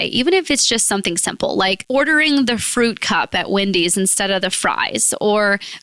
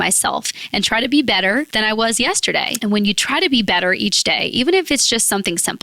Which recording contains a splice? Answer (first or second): second